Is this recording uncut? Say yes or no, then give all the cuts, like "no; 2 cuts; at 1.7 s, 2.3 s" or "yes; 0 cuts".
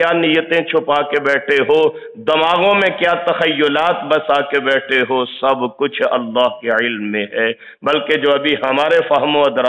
yes; 0 cuts